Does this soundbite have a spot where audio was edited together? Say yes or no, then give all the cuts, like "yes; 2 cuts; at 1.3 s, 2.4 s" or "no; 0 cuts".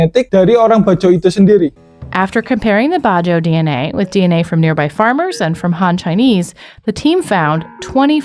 no; 0 cuts